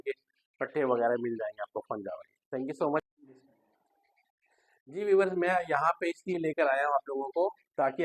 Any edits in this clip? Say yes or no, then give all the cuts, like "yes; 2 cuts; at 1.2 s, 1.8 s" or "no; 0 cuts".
no; 0 cuts